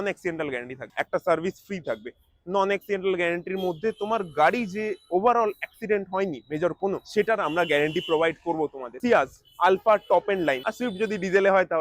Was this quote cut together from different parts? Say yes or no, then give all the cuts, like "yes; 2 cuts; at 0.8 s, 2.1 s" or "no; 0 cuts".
yes; 2 cuts; at 8.9 s, 10.6 s